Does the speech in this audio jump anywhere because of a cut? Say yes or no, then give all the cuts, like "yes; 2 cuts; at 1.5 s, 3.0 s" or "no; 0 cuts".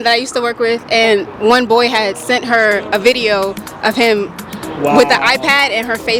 no; 0 cuts